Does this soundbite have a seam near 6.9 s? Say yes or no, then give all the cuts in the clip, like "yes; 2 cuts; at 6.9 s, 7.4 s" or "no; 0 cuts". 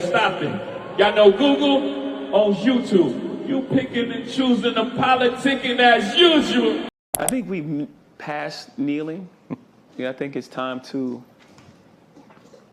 yes; 1 cut; at 6.9 s